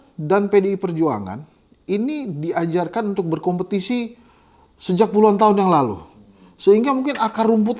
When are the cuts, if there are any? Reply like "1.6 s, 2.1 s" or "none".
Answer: none